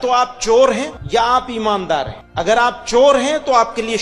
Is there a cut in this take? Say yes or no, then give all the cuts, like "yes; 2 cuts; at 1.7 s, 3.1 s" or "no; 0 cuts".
yes; 2 cuts; at 1.0 s, 2.2 s